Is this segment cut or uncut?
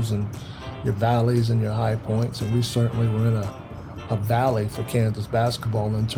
uncut